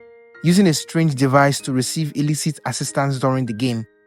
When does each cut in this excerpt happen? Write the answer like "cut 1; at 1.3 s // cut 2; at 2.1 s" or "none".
none